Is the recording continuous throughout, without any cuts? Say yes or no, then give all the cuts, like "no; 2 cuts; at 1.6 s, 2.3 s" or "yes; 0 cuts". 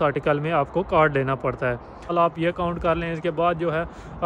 no; 1 cut; at 2.1 s